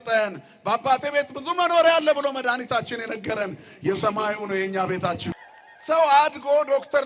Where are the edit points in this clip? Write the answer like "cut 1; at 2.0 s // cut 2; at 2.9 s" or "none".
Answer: cut 1; at 5.3 s

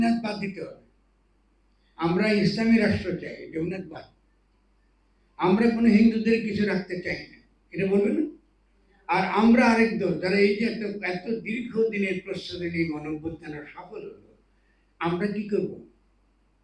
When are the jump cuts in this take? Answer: none

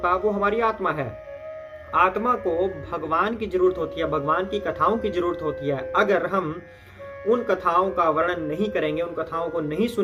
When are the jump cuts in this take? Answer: none

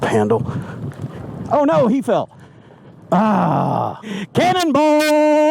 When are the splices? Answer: cut 1; at 4.1 s

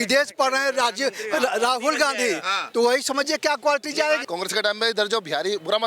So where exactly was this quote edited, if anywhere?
cut 1; at 4.2 s

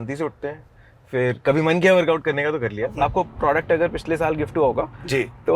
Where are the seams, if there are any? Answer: cut 1; at 2.9 s

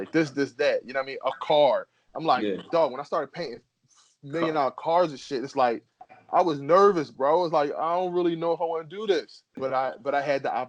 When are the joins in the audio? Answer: cut 1; at 9.6 s

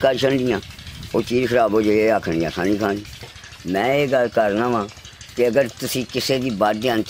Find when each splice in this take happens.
cut 1; at 3.2 s

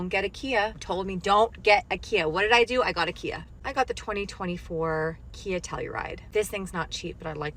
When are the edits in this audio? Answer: none

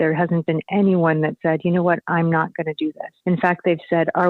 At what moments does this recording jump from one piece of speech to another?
cut 1; at 3.1 s

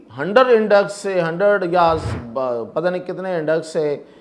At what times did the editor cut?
none

